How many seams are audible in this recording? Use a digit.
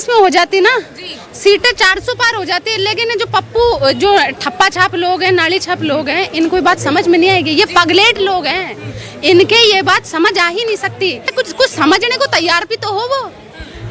1